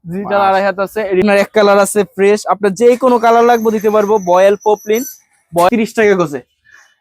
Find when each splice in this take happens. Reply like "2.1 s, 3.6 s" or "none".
1.2 s, 5.7 s